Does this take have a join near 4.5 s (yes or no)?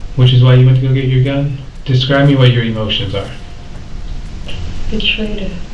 yes